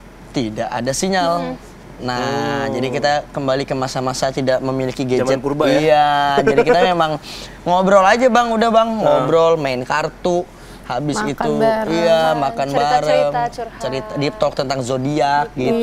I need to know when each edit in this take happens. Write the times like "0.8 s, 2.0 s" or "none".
none